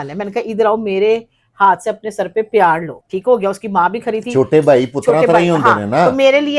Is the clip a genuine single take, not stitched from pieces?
yes; 0 cuts

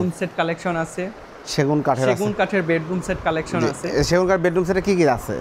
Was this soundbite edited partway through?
no; 0 cuts

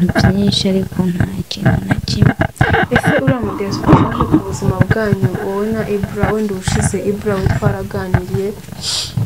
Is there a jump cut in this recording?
no; 0 cuts

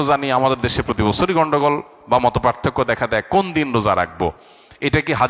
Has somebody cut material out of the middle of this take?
no; 0 cuts

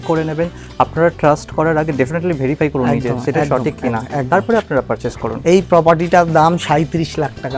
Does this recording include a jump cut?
no; 0 cuts

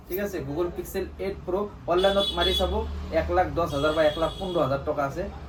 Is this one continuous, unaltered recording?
yes; 0 cuts

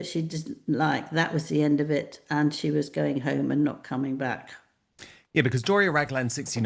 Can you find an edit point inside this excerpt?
no; 0 cuts

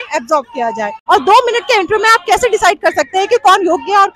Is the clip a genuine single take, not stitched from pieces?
no; 1 cut; at 1.0 s

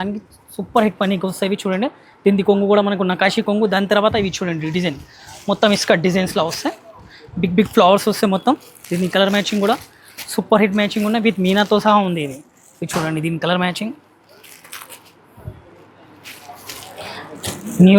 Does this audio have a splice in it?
no; 0 cuts

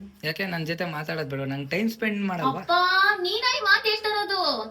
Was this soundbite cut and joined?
no; 0 cuts

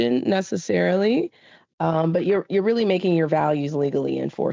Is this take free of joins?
no; 1 cut; at 1.7 s

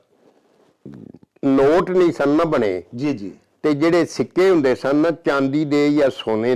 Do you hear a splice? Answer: no; 0 cuts

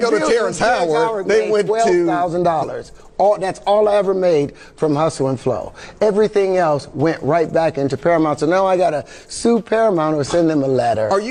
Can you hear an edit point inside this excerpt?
no; 0 cuts

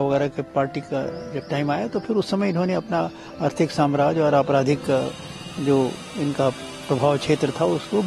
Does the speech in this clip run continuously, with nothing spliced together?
yes; 0 cuts

